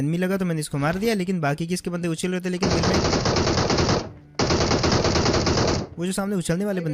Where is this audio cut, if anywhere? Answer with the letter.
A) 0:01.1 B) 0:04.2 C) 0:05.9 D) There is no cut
D